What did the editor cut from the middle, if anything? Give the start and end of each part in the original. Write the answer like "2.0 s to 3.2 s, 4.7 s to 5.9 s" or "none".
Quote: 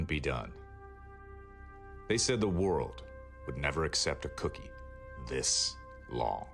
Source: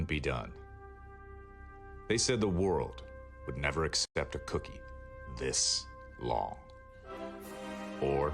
4.0 s to 4.1 s